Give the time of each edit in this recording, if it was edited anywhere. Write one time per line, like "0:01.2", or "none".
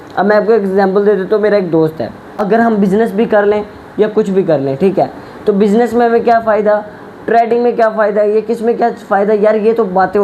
0:02.4